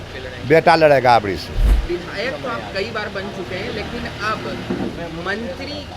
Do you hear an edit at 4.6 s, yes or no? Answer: no